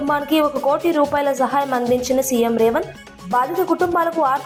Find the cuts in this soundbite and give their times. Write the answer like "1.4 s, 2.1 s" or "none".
none